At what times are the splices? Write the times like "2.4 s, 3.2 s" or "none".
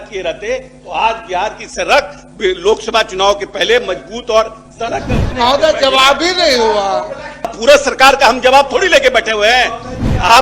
5.2 s, 7.5 s